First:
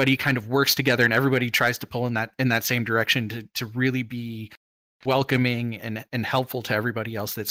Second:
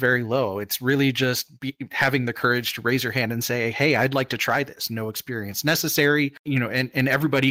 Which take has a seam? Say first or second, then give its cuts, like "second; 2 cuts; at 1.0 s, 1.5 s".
second; 1 cut; at 6.4 s